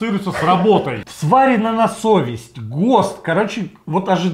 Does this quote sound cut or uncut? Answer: cut